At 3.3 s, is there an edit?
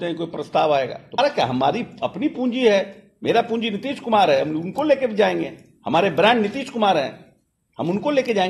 no; 1 cut; at 1.2 s

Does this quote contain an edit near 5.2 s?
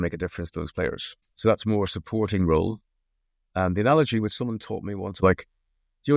yes; 1 cut; at 5.2 s

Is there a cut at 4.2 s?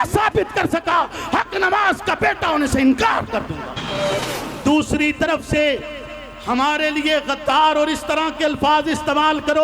yes; 1 cut; at 4.2 s

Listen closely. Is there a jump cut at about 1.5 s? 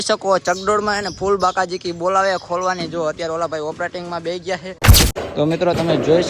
no; 1 cut; at 5.2 s

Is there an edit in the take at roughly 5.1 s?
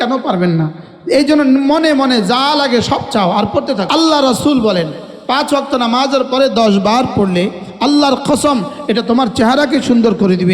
no; 2 cuts; at 3.9 s, 7.7 s

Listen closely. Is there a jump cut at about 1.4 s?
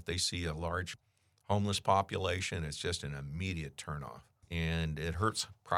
no; 1 cut; at 4.4 s

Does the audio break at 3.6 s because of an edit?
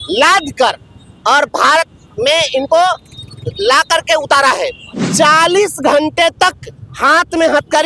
no; 1 cut; at 5.0 s

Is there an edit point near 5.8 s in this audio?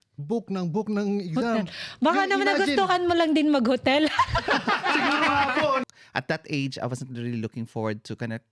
yes; 1 cut; at 5.8 s

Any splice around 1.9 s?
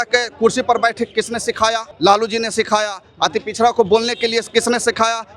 yes; 1 cut; at 1.9 s

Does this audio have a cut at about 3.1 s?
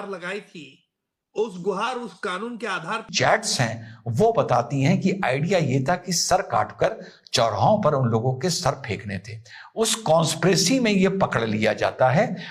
yes; 1 cut; at 3.1 s

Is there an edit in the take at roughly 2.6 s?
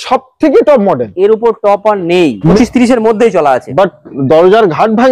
yes; 1 cut; at 2.6 s

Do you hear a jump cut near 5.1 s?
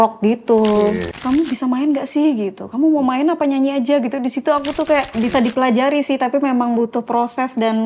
yes; 2 cuts; at 1.1 s, 5.1 s

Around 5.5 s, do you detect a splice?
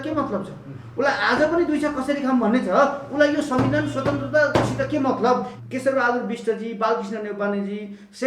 yes; 1 cut; at 5.5 s

